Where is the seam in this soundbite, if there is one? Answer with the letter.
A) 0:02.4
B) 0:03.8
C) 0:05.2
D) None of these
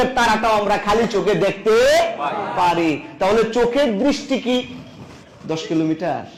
D